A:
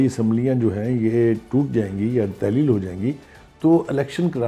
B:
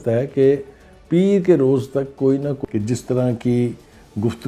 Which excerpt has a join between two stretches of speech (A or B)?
B